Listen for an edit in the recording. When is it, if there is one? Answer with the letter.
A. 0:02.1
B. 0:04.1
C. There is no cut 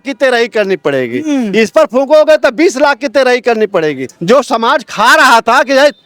B